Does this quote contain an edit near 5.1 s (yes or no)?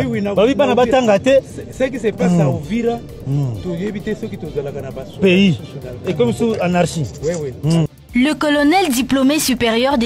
no